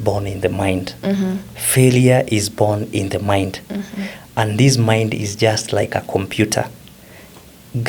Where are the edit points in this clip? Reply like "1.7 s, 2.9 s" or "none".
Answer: none

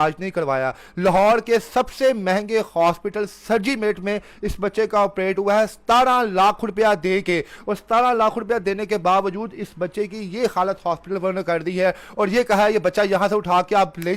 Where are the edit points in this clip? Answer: none

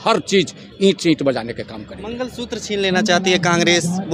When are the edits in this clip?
none

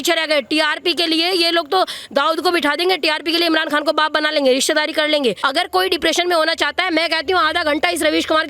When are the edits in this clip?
5.4 s

